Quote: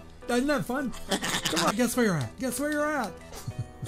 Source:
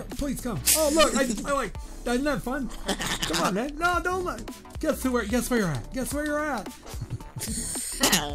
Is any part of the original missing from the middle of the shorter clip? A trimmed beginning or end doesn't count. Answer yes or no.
yes